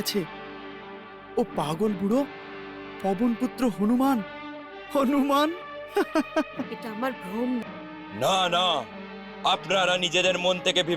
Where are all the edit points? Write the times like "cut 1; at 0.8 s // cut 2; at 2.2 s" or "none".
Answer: cut 1; at 7.6 s